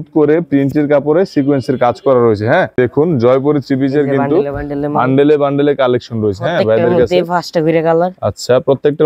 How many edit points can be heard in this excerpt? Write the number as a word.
one